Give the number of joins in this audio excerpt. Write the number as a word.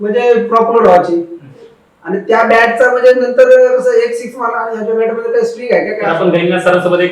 one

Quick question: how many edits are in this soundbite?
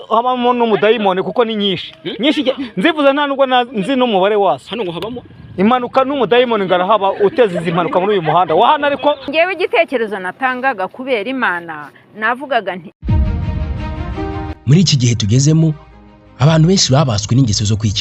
two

